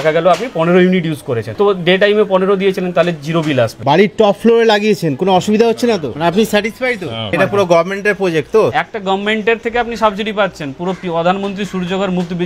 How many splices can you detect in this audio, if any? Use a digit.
2